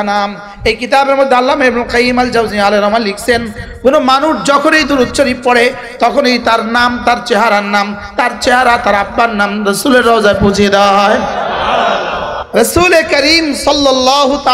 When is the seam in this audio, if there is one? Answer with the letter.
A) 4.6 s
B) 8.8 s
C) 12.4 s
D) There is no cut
C